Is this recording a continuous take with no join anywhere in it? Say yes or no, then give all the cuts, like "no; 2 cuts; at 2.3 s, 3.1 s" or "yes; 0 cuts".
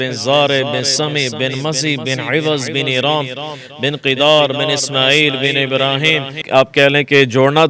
no; 1 cut; at 6.4 s